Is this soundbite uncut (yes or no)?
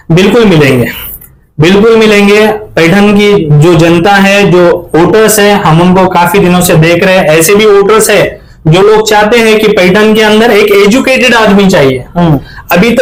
yes